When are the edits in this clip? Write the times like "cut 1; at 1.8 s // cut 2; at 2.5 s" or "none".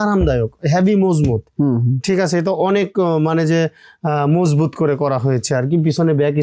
none